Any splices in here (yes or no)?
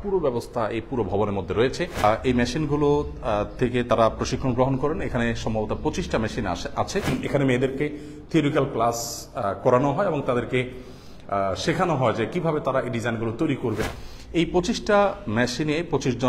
yes